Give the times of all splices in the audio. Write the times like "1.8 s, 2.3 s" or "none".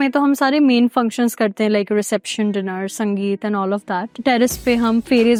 none